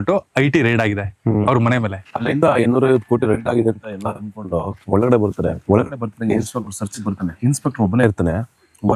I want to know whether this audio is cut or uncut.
cut